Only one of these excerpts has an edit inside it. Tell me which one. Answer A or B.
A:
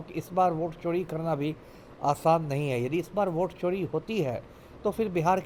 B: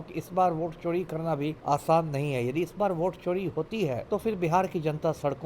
B